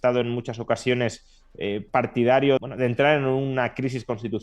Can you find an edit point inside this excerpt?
yes; 1 cut; at 2.6 s

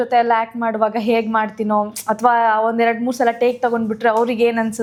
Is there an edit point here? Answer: no; 0 cuts

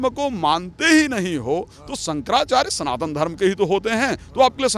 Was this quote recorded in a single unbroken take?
yes; 0 cuts

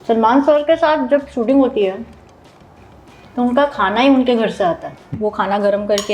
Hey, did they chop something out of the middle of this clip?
yes; 1 cut; at 5.1 s

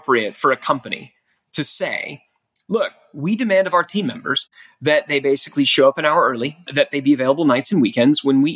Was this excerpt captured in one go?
yes; 0 cuts

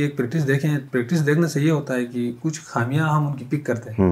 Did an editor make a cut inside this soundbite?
no; 0 cuts

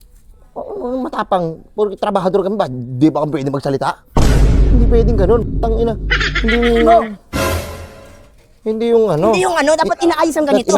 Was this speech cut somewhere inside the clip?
no; 0 cuts

